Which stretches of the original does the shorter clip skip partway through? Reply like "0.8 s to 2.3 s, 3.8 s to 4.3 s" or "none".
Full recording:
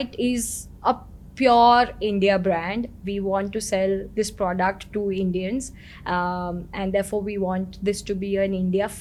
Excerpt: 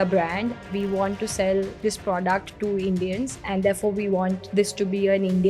5.7 s to 6.7 s